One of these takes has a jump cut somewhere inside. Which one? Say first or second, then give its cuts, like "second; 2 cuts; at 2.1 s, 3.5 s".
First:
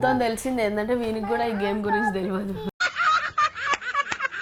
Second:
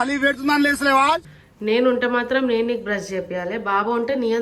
second; 1 cut; at 1.3 s